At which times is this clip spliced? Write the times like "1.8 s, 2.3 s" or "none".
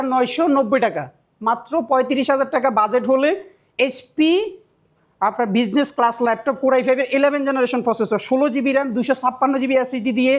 none